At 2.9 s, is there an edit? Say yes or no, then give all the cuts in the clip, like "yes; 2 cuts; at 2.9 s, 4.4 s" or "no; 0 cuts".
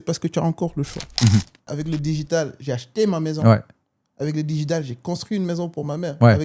no; 1 cut; at 1.7 s